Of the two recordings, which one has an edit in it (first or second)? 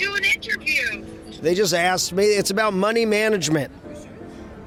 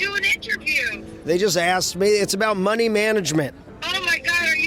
second